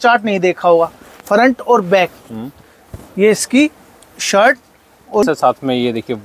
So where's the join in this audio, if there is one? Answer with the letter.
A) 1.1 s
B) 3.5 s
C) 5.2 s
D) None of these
C